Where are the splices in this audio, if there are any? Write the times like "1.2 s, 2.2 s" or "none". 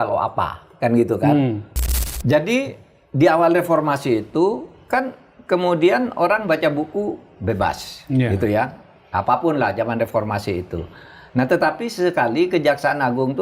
2.1 s